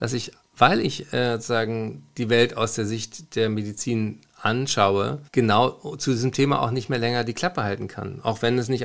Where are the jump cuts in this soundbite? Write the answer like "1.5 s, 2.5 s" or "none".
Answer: 5.2 s

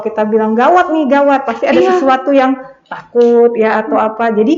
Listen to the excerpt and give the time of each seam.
none

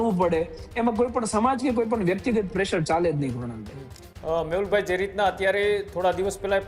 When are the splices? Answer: none

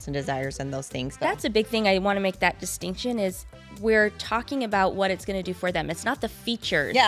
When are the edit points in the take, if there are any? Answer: 1.1 s

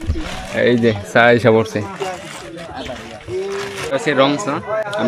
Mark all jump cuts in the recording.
4.1 s

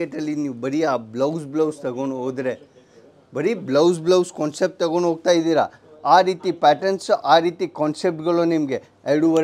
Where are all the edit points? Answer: none

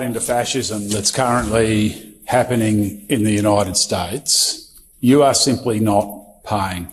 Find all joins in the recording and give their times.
none

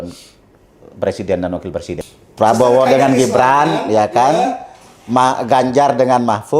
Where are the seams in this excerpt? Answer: 2.2 s

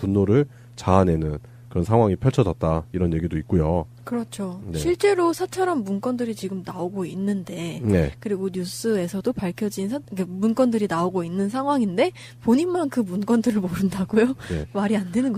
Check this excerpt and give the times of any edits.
7.1 s

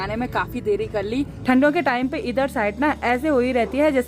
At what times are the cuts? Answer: 1.3 s

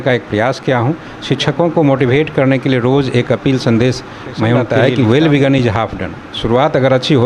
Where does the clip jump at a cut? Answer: 4.7 s

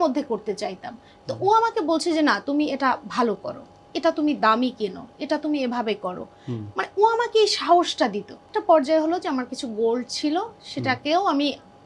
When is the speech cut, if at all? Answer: 8.4 s

